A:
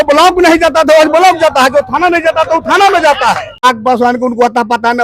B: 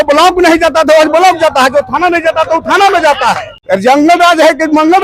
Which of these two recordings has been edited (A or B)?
A